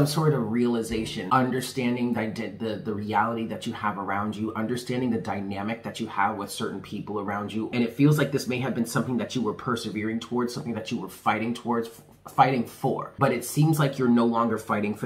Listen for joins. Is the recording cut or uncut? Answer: cut